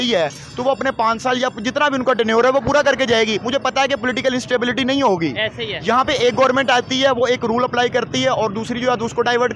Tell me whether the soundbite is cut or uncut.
uncut